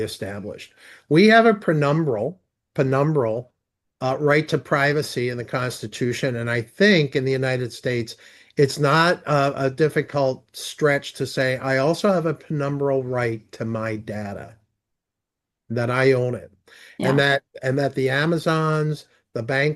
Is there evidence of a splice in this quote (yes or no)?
no